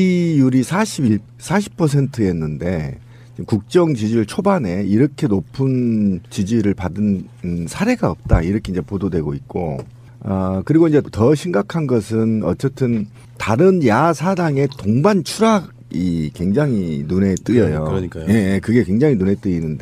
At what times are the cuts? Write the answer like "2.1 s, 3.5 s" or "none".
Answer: none

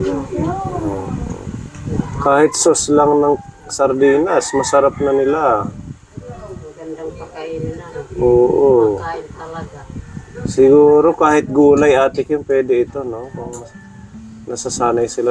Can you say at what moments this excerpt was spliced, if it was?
none

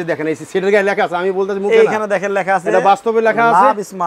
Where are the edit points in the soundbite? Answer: none

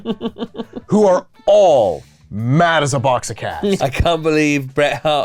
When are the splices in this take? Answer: 3.8 s

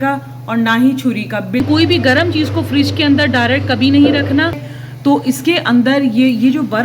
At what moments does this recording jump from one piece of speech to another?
1.6 s, 4.7 s

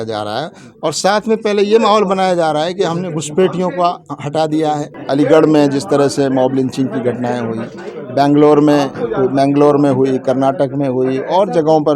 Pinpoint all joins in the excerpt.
4.9 s

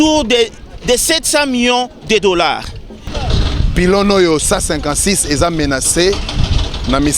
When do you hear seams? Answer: 3.1 s

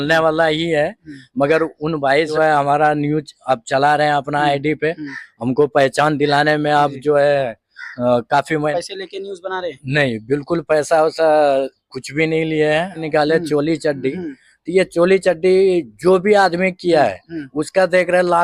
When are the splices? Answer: 2.3 s, 8.7 s, 13.0 s

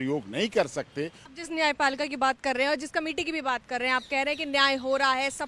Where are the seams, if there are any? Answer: none

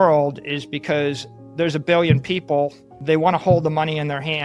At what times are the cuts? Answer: 2.9 s

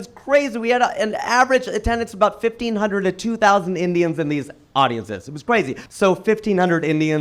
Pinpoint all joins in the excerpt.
5.8 s

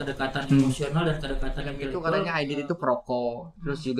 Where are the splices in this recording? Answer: 2.1 s

